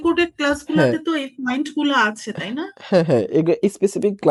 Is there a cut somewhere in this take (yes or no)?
no